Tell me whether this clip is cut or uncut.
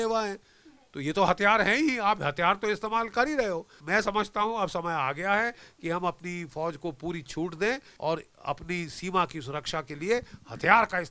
cut